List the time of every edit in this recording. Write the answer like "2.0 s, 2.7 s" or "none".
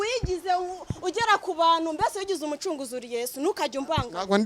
none